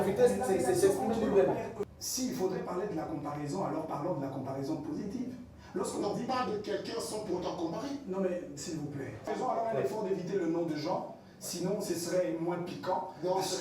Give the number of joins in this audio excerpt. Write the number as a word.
two